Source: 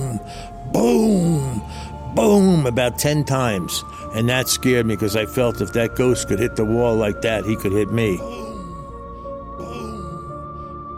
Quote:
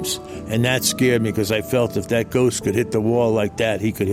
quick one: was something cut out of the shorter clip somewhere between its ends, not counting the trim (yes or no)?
no